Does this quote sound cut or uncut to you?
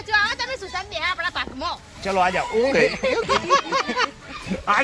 cut